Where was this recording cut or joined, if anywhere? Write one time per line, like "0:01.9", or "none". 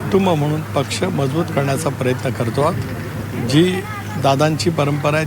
none